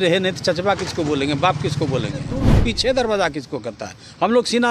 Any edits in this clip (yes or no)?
yes